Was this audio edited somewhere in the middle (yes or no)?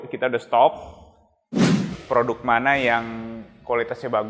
yes